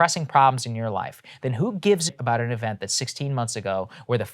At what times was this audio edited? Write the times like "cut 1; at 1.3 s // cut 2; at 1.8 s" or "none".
cut 1; at 2.2 s